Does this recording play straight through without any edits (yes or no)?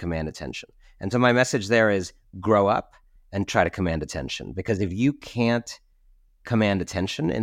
yes